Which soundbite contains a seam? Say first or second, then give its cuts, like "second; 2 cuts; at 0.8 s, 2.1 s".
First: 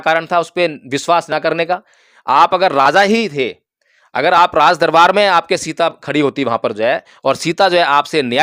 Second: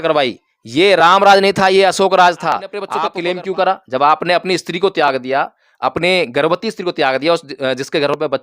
second; 1 cut; at 2.9 s